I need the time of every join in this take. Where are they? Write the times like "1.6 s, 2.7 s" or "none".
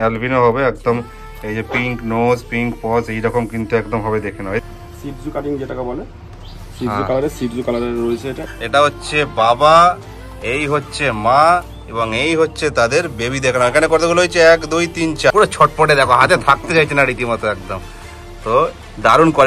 4.6 s, 8.4 s, 15.3 s